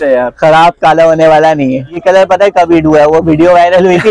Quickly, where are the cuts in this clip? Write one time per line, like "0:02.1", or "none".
0:02.0

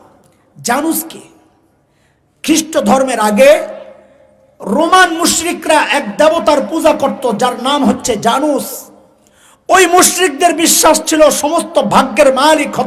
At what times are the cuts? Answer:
none

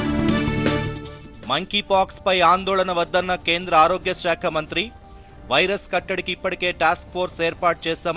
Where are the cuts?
0:00.9

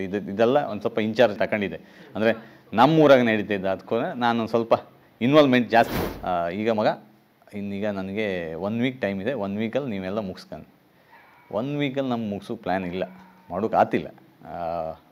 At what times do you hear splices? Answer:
0:01.4
0:06.0

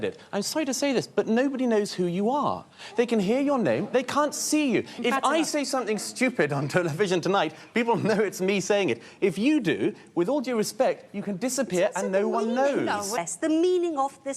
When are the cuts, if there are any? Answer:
0:13.2

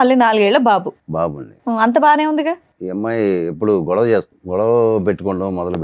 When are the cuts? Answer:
0:02.7
0:04.4

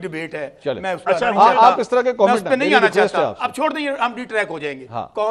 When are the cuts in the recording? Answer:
none

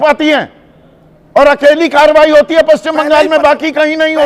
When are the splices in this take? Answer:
none

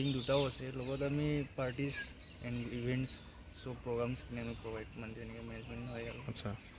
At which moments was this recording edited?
none

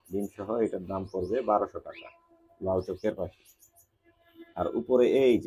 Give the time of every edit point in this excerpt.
none

